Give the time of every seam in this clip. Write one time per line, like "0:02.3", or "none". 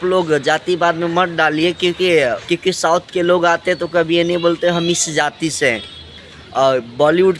0:02.4